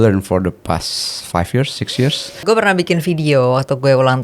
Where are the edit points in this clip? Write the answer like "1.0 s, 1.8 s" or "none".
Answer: 2.4 s